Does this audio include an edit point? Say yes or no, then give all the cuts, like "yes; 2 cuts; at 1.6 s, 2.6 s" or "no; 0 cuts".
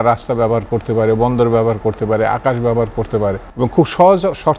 yes; 1 cut; at 3.5 s